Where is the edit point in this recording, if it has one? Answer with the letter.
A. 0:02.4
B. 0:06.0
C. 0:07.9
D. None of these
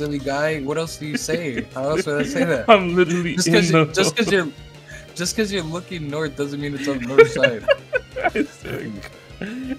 D